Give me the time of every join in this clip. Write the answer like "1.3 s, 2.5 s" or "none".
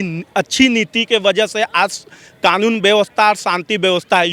none